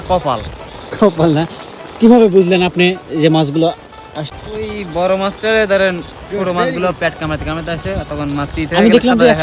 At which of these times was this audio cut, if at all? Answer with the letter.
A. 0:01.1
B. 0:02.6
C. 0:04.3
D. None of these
C